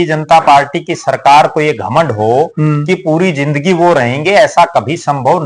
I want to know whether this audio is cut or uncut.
uncut